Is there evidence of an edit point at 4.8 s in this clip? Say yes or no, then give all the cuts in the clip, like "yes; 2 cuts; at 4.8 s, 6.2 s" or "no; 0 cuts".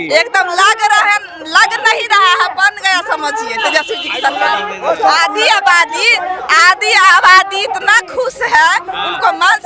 no; 0 cuts